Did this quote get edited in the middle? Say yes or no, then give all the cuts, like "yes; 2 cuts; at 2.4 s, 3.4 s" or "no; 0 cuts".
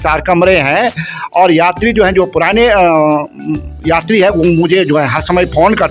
no; 0 cuts